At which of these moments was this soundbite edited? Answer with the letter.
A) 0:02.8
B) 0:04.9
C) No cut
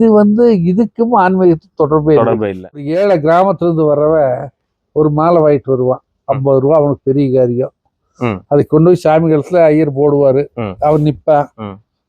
A